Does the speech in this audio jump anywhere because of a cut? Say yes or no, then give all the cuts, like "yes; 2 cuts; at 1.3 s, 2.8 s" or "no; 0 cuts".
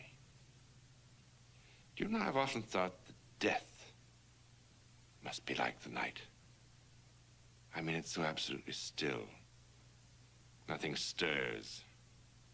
yes; 1 cut; at 2.9 s